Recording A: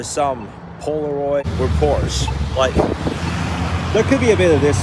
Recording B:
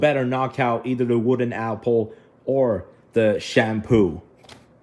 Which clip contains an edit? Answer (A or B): A